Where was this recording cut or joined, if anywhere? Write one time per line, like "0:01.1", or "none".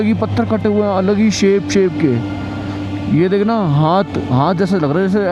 none

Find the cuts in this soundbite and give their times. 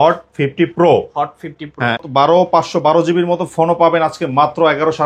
0:02.0

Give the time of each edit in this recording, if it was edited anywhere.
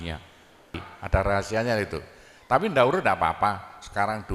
0:00.9

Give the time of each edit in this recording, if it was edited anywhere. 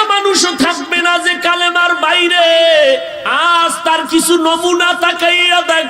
0:03.2

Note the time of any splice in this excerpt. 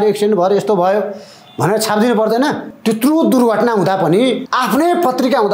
0:02.7
0:04.5

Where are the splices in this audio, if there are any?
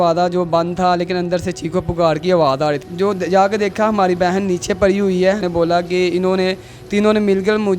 0:02.8
0:05.4

